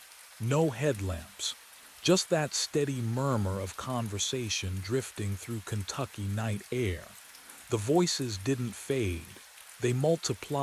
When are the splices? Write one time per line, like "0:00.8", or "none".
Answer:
none